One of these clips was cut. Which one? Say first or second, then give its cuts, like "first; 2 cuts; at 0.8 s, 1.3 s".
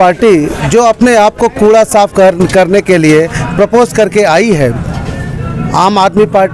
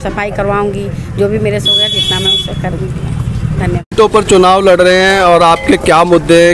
second; 1 cut; at 3.9 s